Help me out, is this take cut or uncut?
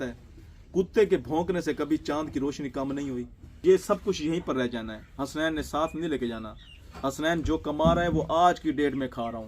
cut